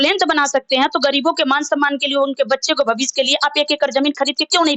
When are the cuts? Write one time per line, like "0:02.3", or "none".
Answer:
none